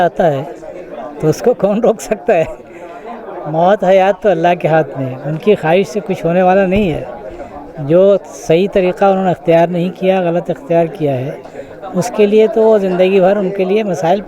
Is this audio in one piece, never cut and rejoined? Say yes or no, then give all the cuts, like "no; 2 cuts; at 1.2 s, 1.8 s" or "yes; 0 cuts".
yes; 0 cuts